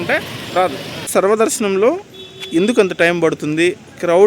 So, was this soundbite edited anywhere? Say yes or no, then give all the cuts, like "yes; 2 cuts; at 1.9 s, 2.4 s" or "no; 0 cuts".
yes; 1 cut; at 0.9 s